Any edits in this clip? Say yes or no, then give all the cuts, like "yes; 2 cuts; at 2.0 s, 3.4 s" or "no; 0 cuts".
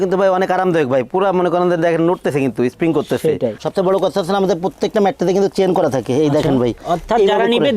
yes; 2 cuts; at 3.6 s, 6.8 s